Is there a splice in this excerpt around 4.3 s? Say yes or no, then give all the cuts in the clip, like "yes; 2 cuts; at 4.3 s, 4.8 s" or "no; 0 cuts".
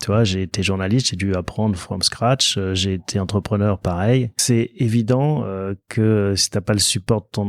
yes; 1 cut; at 4.3 s